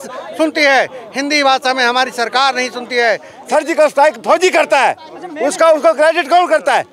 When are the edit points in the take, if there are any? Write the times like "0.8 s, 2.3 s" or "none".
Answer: 3.3 s